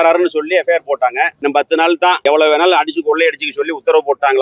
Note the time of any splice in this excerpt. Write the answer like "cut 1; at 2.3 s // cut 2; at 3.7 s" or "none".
cut 1; at 1.4 s